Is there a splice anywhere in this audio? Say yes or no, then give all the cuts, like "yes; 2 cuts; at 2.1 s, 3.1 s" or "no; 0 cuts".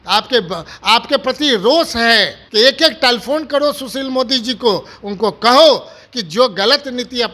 yes; 1 cut; at 2.4 s